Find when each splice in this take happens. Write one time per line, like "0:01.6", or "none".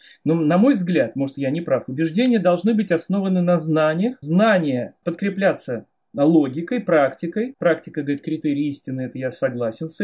0:04.2
0:05.0
0:07.5